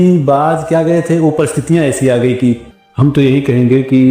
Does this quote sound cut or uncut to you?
cut